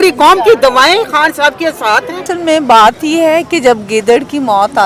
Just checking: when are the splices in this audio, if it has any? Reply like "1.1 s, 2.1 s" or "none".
2.2 s